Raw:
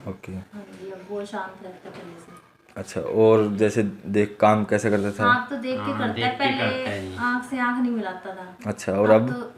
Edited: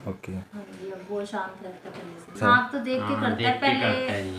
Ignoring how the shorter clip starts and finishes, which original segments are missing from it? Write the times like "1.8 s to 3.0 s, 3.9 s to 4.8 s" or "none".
2.4 s to 5.1 s